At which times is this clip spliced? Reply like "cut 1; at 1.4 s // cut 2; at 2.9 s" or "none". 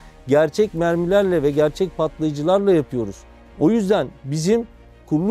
none